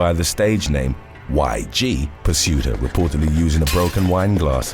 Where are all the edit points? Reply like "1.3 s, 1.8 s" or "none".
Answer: 2.2 s